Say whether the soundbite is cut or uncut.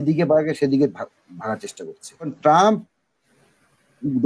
cut